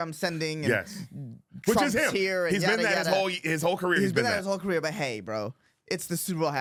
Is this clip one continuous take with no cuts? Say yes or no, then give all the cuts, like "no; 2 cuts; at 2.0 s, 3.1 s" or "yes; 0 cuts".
yes; 0 cuts